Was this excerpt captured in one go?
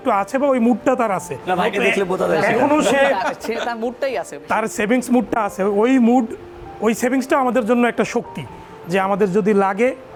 yes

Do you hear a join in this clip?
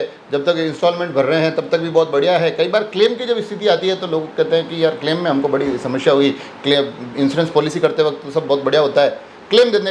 no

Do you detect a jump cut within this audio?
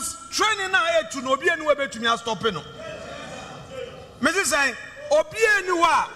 no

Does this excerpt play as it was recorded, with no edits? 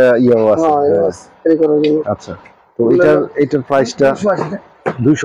yes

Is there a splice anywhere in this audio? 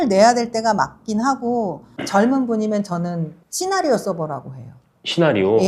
yes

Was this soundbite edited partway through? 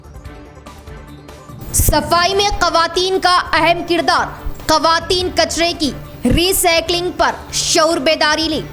yes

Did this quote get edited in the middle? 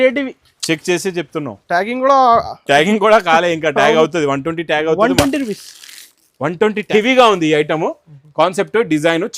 yes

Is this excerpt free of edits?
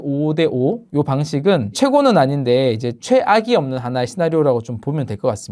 no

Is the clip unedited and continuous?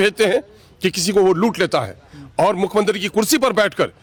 yes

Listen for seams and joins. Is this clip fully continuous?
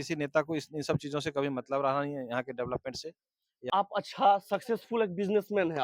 no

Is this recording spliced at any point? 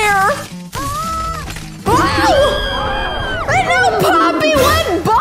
no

